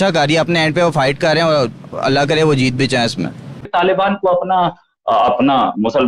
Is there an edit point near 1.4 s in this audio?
no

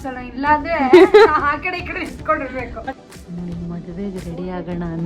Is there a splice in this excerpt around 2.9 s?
yes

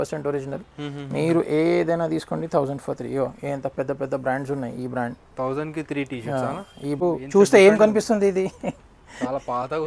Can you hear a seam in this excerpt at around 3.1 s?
no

